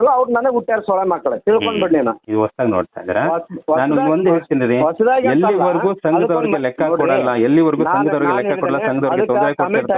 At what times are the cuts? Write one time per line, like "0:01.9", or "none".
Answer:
0:02.2